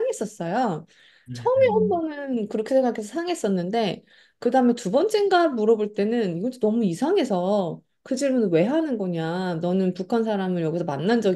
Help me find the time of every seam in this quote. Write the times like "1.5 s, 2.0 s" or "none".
none